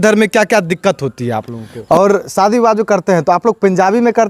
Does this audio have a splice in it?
yes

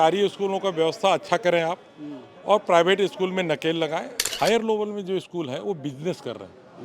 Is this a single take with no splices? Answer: no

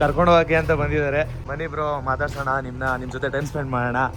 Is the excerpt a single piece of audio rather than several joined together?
yes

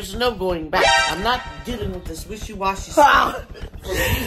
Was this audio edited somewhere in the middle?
no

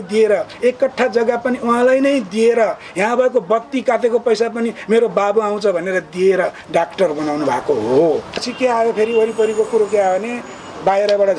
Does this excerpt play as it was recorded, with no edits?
no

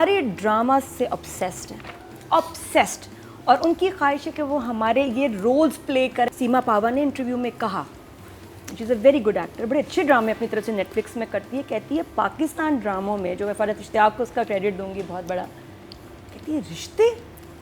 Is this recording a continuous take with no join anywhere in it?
no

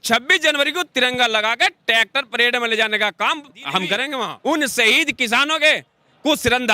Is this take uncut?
no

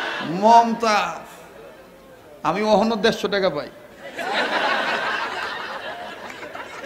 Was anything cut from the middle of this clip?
no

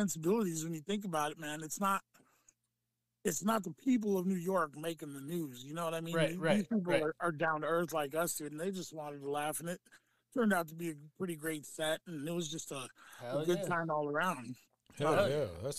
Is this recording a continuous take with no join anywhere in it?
yes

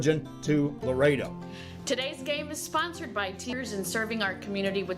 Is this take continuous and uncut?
no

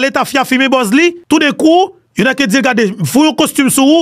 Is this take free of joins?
no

